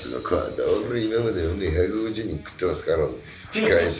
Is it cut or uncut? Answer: uncut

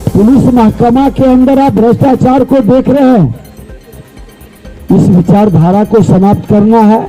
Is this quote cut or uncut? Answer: uncut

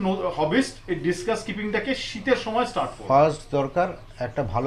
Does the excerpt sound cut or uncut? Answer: uncut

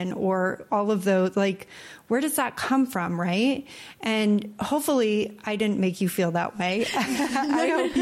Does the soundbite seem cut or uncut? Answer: uncut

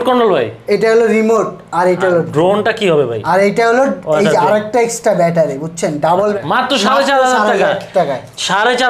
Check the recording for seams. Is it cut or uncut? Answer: cut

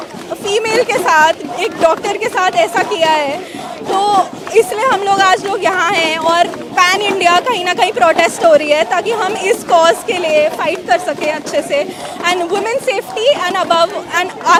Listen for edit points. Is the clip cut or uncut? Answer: uncut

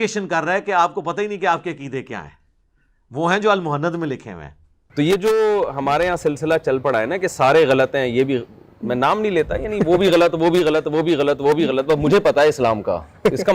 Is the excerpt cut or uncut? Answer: cut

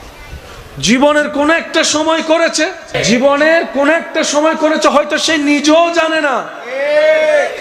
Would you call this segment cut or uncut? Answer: cut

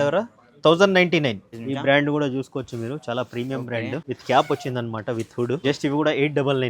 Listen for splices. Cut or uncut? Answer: cut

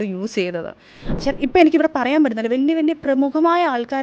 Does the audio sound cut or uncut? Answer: cut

